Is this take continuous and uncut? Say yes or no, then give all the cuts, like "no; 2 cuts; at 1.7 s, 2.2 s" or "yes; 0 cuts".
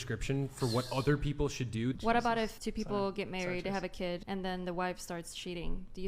no; 3 cuts; at 2.0 s, 2.5 s, 4.2 s